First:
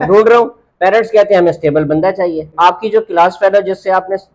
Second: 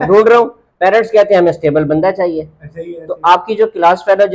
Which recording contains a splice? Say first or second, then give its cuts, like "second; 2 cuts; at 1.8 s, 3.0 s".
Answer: first; 1 cut; at 2.4 s